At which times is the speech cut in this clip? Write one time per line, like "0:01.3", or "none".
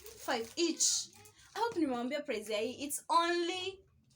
0:01.6